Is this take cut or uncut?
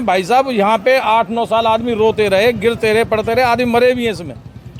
uncut